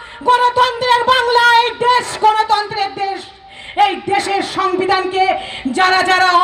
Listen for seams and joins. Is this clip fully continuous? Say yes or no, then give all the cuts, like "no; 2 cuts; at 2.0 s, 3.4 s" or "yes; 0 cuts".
yes; 0 cuts